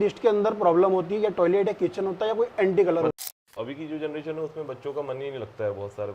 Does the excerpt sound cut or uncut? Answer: cut